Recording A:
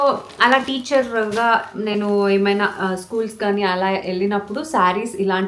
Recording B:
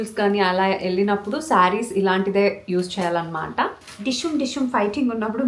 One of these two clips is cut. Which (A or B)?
B